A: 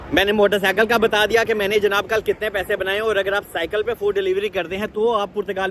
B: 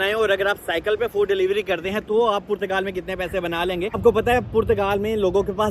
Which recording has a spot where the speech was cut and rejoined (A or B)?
B